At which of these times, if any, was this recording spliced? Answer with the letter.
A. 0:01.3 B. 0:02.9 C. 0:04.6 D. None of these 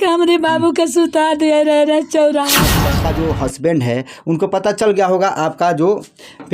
B